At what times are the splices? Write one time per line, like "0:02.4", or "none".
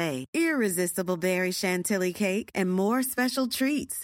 none